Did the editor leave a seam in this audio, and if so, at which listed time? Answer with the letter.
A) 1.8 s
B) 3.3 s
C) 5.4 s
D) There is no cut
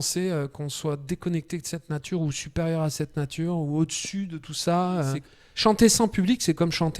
C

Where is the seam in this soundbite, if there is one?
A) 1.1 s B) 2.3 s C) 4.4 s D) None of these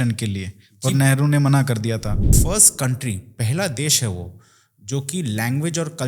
B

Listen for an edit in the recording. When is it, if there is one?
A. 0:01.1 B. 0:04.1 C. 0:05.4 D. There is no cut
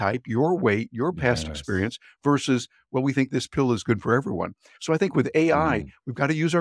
D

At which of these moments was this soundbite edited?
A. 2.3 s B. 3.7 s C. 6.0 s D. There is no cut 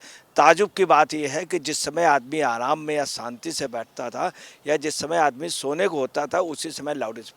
B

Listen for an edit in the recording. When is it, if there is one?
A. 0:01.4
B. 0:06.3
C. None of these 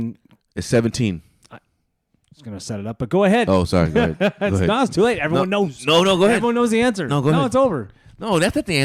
C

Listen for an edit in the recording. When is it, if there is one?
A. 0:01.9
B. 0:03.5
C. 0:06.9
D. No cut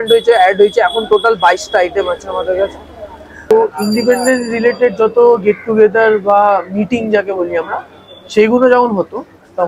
B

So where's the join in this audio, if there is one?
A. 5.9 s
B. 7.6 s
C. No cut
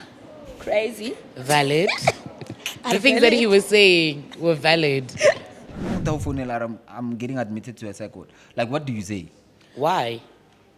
A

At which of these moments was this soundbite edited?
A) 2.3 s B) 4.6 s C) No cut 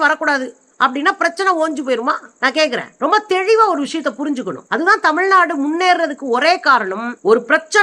C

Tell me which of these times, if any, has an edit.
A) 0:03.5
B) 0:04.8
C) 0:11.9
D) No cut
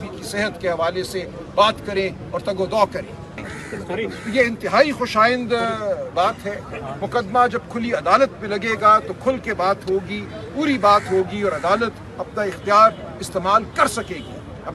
A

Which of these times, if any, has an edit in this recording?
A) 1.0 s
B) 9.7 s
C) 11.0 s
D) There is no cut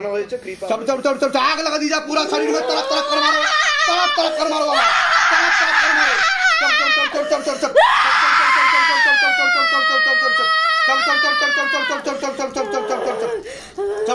A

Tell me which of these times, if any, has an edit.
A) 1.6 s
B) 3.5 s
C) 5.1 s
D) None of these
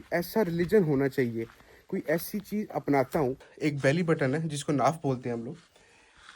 B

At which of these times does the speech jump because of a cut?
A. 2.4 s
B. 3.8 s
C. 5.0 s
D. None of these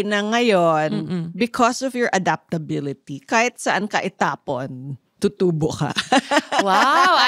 D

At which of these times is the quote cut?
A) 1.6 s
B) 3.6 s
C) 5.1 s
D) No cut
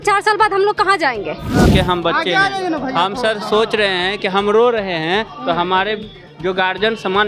A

